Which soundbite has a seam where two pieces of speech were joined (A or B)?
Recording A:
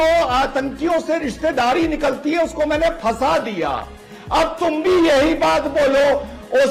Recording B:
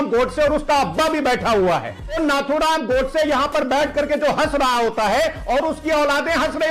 B